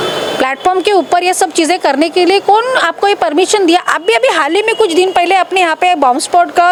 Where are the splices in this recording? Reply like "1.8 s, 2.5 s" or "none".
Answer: none